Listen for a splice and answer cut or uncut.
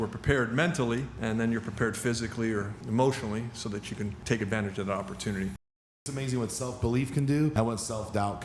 cut